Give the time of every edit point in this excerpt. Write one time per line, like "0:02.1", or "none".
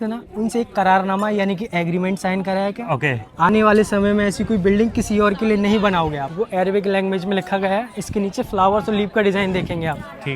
0:06.2